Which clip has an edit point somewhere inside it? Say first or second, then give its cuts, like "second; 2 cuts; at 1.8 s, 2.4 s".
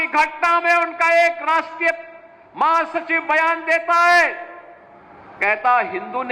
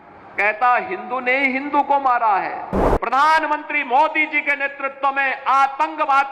second; 1 cut; at 2.8 s